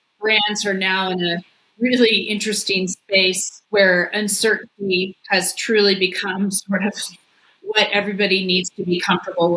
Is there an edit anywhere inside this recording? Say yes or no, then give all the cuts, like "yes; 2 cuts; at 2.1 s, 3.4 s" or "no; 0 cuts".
yes; 2 cuts; at 3.5 s, 5.2 s